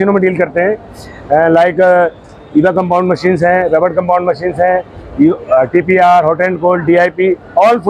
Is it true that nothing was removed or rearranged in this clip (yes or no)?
yes